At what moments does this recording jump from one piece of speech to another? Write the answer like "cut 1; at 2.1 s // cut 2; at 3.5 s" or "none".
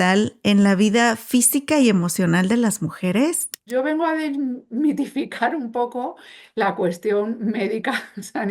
cut 1; at 3.6 s